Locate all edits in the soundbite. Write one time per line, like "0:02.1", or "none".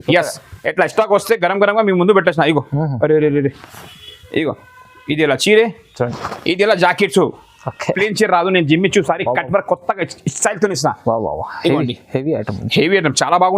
0:08.0